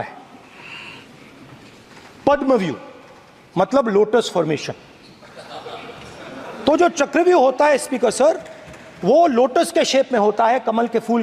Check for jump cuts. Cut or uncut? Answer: uncut